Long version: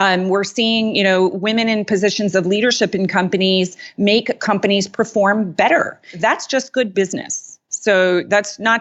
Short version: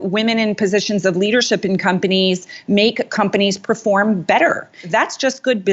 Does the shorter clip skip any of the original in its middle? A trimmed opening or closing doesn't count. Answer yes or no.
no